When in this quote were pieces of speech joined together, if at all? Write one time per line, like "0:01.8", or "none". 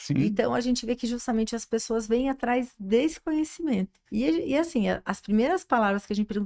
0:04.0